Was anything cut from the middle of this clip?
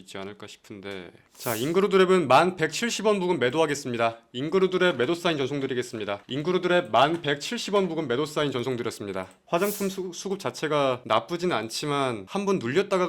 no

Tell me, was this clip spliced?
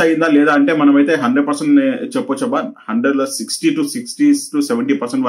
no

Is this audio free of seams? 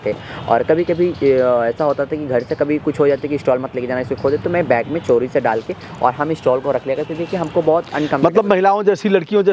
yes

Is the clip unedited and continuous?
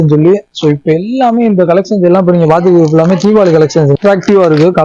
no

